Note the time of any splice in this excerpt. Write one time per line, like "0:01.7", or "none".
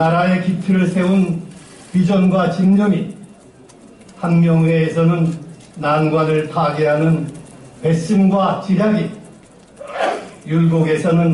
none

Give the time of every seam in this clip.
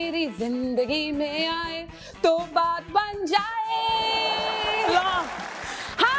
none

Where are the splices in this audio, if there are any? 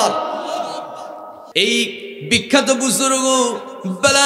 0:01.4

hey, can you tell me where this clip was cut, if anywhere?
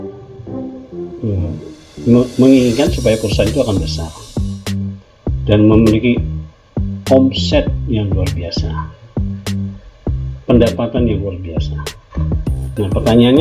none

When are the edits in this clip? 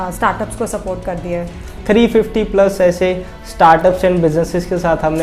0:01.7

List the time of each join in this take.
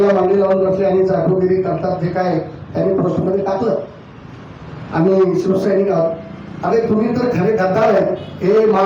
none

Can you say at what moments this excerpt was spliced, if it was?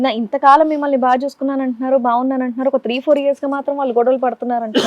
none

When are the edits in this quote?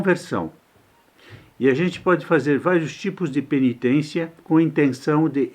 0:04.4

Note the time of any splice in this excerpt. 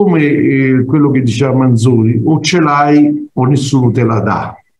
none

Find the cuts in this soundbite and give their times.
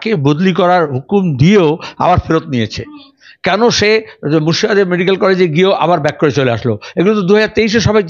none

